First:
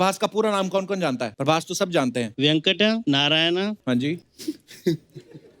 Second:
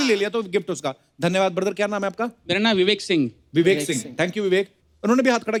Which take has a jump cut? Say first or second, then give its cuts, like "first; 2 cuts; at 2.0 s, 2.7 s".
first; 4 cuts; at 1.3 s, 2.3 s, 3.0 s, 4.1 s